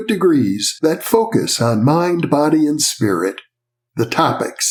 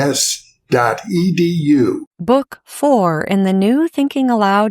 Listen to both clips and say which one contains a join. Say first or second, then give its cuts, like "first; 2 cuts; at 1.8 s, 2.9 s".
second; 1 cut; at 2.1 s